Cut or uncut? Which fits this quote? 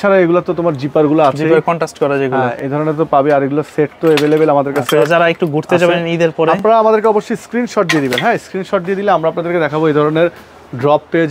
uncut